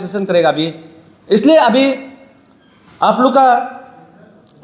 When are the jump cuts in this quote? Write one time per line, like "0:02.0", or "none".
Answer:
none